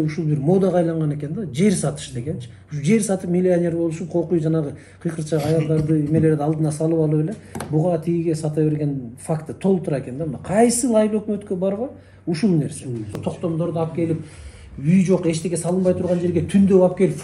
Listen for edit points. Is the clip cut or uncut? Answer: cut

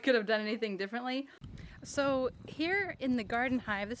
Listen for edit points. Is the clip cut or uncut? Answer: cut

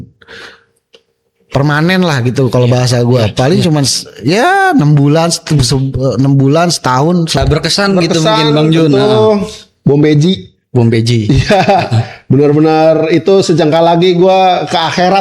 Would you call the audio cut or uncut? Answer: cut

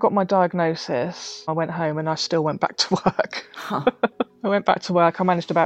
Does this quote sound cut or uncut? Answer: cut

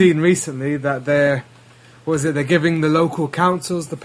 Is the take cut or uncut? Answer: uncut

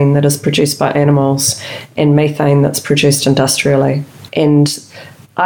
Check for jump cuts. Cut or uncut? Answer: cut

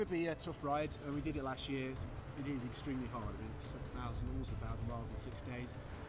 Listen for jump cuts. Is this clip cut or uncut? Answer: uncut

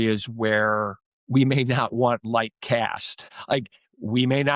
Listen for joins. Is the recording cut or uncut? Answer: cut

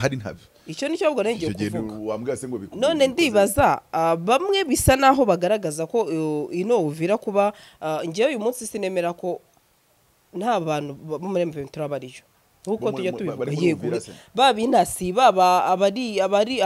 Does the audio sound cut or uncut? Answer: uncut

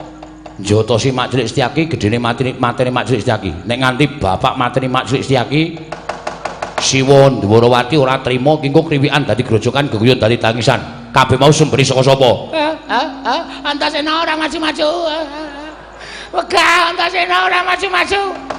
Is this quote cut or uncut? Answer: uncut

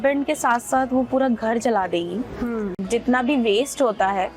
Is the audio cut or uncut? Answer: cut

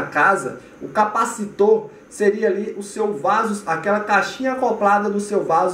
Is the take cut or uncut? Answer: uncut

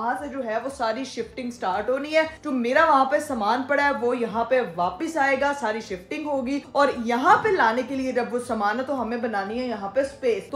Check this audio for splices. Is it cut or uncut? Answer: uncut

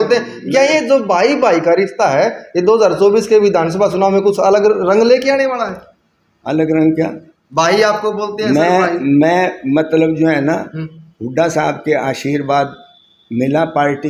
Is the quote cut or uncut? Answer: uncut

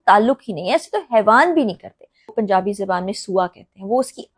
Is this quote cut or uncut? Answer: cut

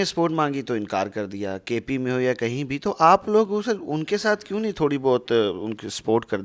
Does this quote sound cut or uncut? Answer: uncut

